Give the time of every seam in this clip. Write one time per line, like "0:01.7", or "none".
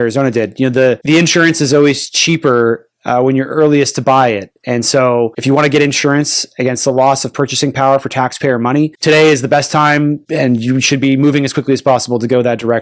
0:01.0
0:05.4
0:09.0
0:10.2